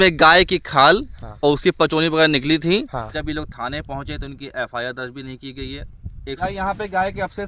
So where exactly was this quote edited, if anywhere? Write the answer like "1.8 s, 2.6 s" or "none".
3.1 s, 6.4 s